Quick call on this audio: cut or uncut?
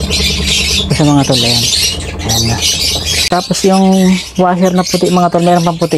cut